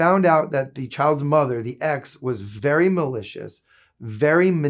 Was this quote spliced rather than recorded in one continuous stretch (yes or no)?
no